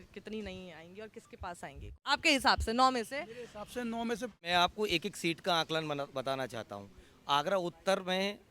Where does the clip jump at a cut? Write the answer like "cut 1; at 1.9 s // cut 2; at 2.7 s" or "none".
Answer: cut 1; at 2.0 s // cut 2; at 4.5 s